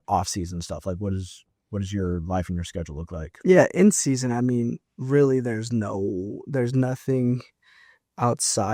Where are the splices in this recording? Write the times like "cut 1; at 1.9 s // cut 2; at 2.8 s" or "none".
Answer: none